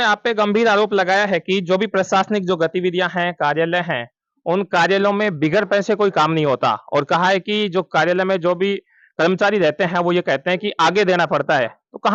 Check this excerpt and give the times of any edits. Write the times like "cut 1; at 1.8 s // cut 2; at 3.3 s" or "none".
none